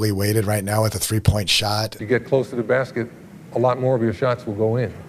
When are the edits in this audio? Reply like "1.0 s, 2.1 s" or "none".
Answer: 1.9 s